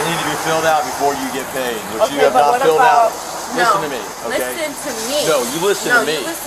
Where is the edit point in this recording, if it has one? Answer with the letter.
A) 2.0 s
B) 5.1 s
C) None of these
C